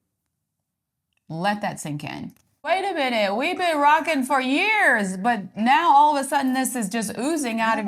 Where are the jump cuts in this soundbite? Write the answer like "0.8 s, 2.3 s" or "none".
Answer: 2.7 s